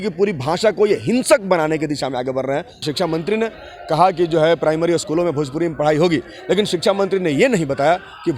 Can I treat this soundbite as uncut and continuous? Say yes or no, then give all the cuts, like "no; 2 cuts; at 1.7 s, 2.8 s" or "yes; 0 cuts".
no; 1 cut; at 2.8 s